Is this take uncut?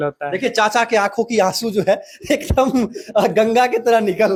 yes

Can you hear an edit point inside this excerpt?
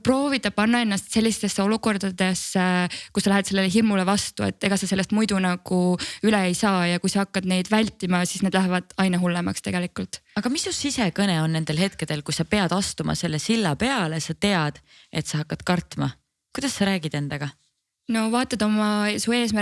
no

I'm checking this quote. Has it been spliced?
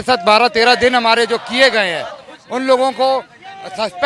no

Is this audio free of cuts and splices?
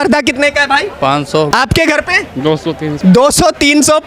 no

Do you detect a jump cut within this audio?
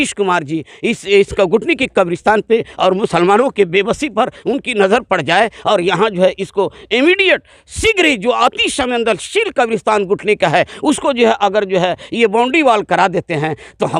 no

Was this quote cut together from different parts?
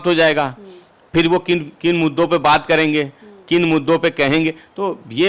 no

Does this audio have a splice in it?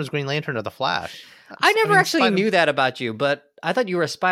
no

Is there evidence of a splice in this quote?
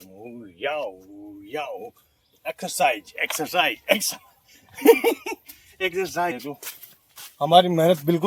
yes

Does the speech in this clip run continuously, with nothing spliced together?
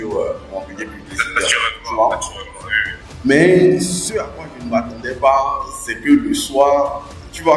yes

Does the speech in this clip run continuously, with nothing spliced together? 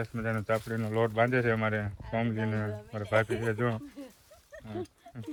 yes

